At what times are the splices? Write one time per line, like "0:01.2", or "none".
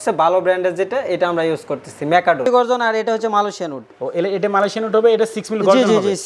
0:02.5